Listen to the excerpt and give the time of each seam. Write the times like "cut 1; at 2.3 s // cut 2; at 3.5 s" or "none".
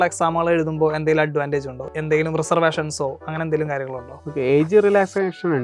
cut 1; at 1.8 s